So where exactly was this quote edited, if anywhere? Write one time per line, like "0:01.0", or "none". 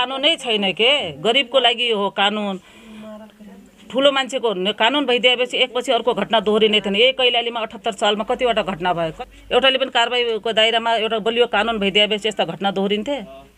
0:09.2